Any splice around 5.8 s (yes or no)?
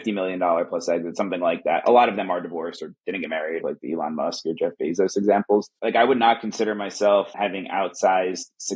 yes